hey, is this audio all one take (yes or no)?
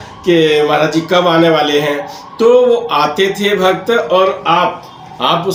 yes